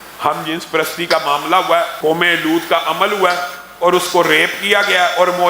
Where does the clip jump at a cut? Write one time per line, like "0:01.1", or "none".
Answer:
0:01.9